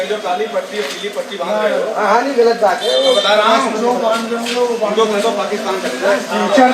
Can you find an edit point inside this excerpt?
no; 0 cuts

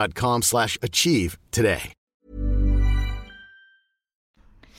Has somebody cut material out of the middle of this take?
no; 0 cuts

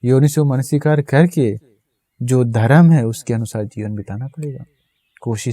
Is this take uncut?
yes; 0 cuts

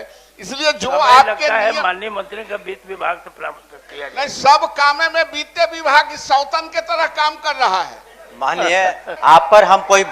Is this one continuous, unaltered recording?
no; 1 cut; at 9.1 s

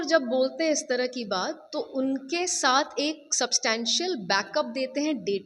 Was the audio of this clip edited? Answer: no; 0 cuts

